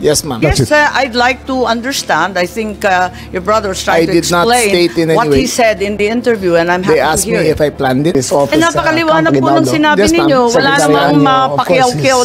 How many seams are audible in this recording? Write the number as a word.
one